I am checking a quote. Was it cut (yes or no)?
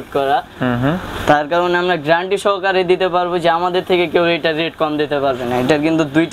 no